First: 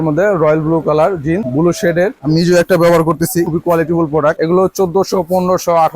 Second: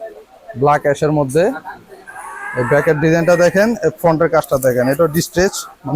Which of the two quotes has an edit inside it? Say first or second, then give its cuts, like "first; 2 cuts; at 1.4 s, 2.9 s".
first; 3 cuts; at 1.8 s, 3.5 s, 4.4 s